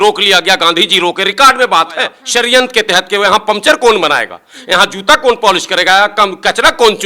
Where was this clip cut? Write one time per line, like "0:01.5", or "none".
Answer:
0:02.2